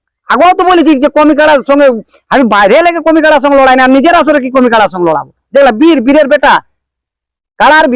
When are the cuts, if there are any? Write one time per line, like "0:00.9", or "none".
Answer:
none